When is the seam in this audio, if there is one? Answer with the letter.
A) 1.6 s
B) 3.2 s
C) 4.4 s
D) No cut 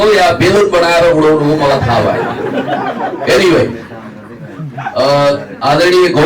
D